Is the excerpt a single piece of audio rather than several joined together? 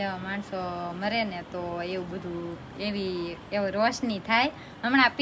yes; 0 cuts

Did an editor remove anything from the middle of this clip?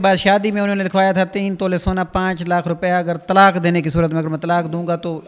no; 0 cuts

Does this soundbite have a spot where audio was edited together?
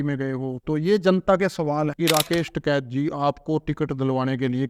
yes; 1 cut; at 2.0 s

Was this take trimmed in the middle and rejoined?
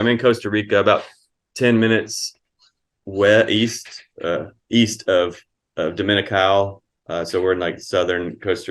no; 0 cuts

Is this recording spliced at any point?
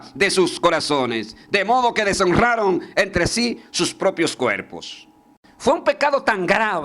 yes; 1 cut; at 5.4 s

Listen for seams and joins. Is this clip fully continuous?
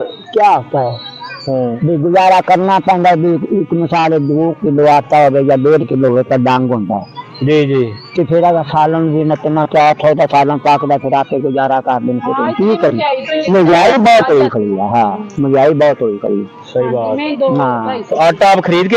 yes; 0 cuts

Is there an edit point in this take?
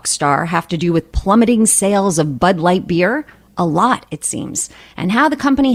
no; 0 cuts

